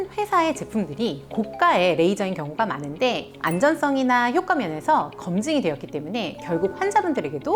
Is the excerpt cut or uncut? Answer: cut